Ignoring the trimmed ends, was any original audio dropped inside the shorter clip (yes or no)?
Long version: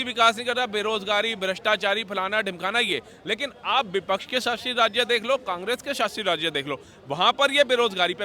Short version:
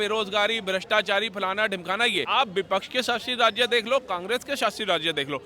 yes